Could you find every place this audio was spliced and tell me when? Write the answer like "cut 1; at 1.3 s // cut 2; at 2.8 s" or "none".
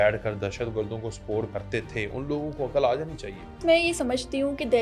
cut 1; at 1.5 s // cut 2; at 3.6 s